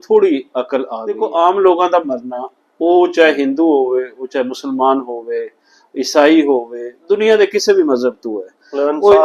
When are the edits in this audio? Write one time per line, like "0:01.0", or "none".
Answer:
0:01.0